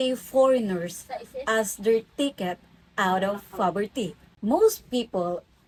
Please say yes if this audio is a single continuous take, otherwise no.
yes